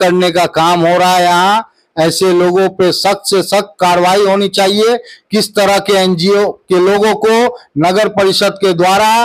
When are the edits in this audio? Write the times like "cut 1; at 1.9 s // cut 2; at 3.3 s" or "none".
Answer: none